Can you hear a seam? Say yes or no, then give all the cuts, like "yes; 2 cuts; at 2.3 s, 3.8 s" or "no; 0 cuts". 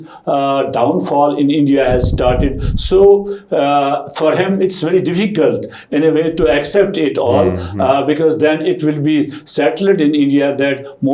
no; 0 cuts